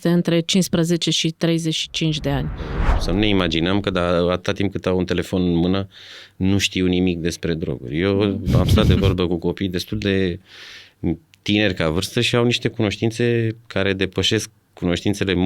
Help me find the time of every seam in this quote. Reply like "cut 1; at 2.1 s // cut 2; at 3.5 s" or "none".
cut 1; at 2.9 s